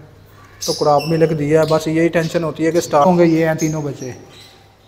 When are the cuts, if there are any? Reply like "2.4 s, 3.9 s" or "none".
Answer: 3.0 s